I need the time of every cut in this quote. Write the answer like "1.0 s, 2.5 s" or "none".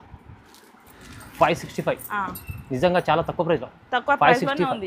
1.0 s